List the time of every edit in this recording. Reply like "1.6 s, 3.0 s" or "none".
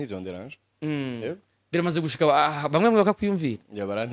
none

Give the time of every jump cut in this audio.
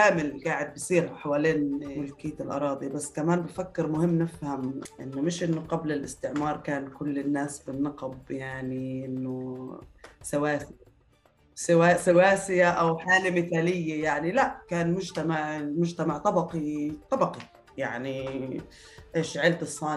1.9 s, 4.8 s

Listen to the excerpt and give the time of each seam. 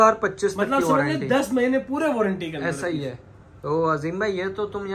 none

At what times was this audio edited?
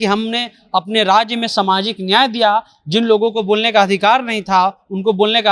none

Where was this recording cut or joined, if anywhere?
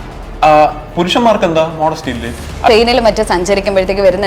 2.7 s

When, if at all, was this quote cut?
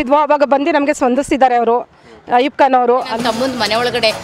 3.1 s

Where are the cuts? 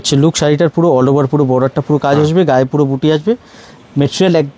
none

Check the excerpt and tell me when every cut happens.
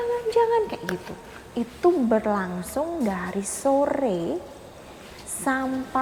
none

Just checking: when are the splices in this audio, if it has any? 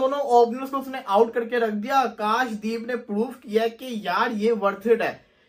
none

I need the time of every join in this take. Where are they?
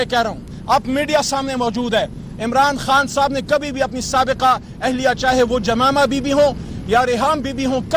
none

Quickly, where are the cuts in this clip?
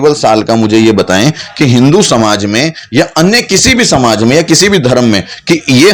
none

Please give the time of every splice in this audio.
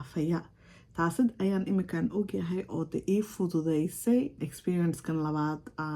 4.5 s

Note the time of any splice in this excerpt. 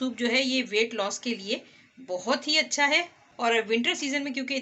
3.2 s

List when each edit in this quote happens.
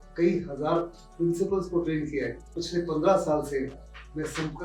2.6 s

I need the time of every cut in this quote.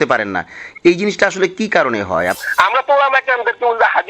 2.4 s

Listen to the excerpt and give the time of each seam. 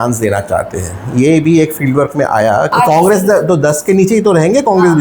2.7 s

